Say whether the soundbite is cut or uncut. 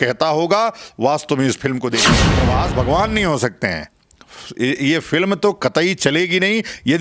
cut